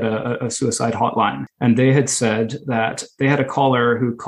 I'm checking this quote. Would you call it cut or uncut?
cut